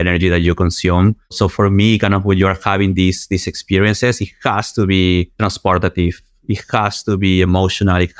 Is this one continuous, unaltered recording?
no; 2 cuts; at 1.3 s, 5.3 s

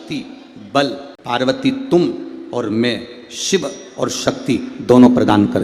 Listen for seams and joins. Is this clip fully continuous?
no; 1 cut; at 1.1 s

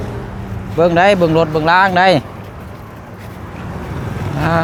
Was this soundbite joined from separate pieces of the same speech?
no; 0 cuts

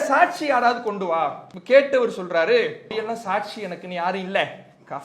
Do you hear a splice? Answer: yes; 2 cuts; at 1.5 s, 2.9 s

